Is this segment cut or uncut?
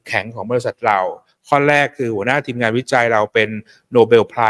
uncut